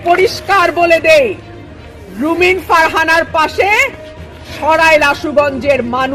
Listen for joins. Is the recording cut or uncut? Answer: uncut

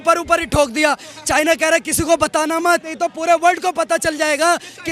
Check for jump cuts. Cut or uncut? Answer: cut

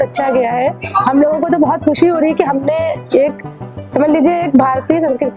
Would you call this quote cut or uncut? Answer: uncut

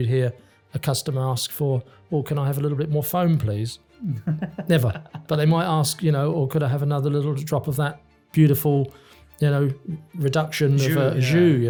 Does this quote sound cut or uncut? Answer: uncut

